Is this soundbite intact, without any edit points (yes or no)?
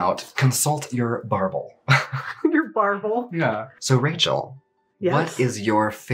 no